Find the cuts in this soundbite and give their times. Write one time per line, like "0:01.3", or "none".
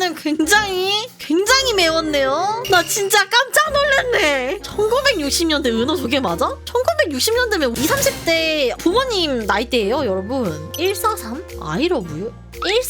0:02.6
0:10.7